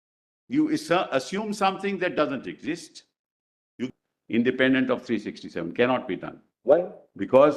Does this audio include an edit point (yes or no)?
yes